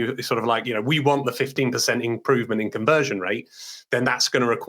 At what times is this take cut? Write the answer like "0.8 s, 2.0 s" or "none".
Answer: 1.5 s